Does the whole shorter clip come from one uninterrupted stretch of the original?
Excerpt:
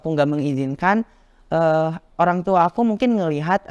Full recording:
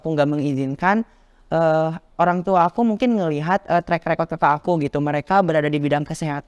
yes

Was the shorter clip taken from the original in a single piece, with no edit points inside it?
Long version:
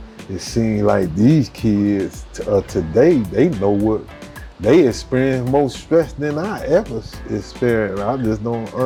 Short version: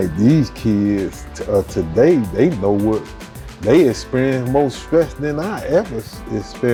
yes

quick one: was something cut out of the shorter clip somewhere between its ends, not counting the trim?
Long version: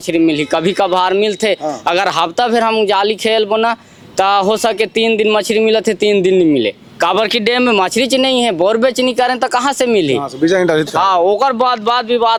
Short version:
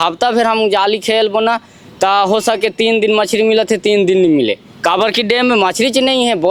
no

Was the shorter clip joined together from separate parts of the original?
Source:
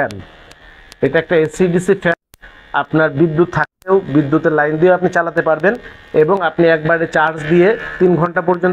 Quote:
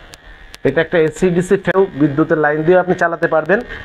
yes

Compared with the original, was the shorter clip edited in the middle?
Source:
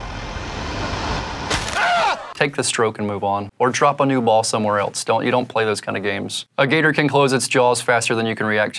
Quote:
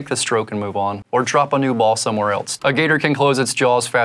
yes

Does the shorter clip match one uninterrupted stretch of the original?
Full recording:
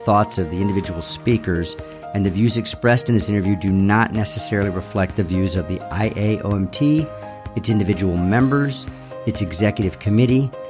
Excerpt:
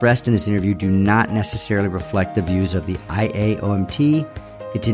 yes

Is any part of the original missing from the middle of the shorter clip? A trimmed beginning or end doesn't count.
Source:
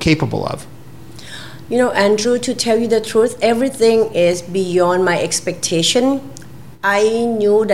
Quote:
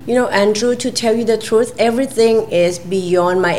no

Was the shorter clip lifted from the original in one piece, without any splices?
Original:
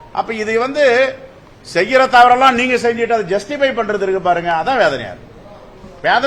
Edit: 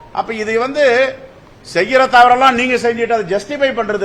yes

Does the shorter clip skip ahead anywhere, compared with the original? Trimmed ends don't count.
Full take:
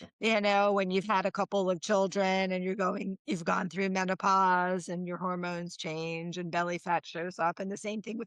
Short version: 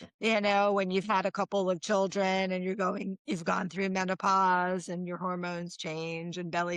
no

